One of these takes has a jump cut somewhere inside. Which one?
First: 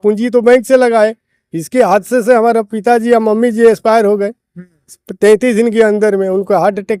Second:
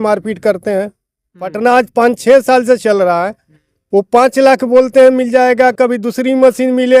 second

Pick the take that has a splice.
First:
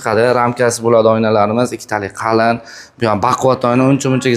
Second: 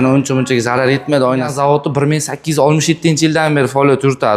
second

